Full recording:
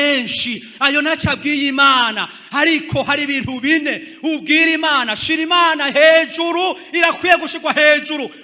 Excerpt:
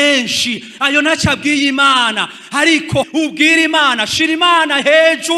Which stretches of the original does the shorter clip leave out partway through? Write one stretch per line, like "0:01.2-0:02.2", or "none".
0:03.1-0:04.2